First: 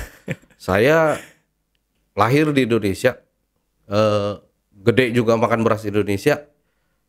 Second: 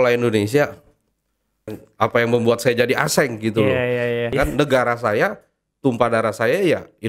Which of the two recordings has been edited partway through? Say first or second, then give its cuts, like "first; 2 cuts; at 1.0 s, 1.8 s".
second; 2 cuts; at 1.7 s, 4.3 s